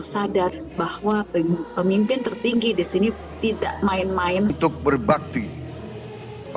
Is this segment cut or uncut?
cut